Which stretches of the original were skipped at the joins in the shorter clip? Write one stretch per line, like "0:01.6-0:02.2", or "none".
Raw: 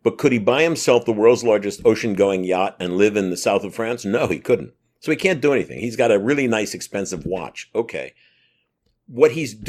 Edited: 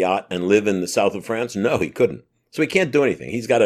none